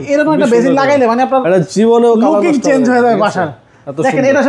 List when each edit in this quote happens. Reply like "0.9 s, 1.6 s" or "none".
none

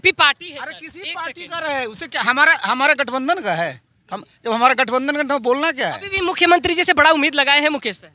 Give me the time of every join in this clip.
none

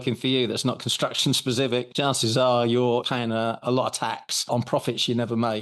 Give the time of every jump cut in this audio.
1.9 s, 3.0 s, 4.3 s

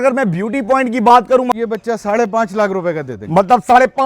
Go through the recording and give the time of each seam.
1.5 s

